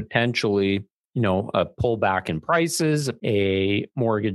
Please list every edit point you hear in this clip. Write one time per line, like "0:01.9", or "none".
0:01.0
0:03.1